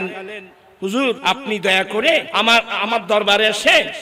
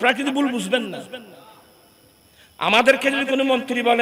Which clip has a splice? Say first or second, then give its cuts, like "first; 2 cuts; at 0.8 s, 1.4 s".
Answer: first; 2 cuts; at 1.2 s, 2.3 s